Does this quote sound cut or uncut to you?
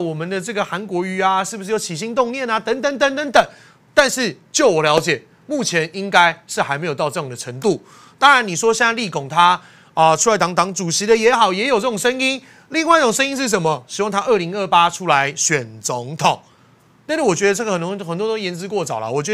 uncut